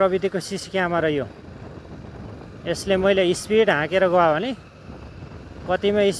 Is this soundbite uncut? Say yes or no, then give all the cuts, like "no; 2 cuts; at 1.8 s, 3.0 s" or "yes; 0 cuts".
yes; 0 cuts